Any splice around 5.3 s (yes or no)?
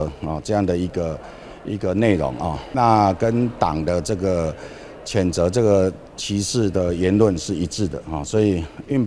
no